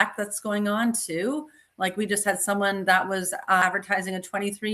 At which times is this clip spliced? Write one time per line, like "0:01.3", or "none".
0:03.6